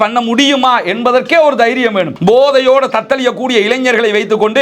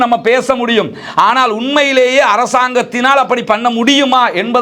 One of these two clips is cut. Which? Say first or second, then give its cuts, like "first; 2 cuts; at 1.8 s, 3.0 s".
first; 1 cut; at 2.1 s